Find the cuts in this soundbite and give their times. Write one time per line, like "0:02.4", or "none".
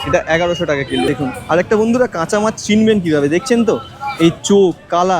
0:01.1